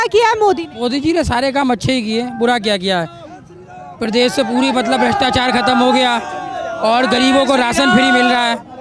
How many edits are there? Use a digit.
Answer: 0